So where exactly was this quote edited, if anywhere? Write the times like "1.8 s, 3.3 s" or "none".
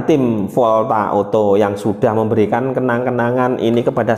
none